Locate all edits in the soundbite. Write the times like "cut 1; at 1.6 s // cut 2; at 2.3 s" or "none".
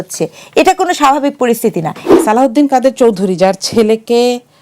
cut 1; at 2.1 s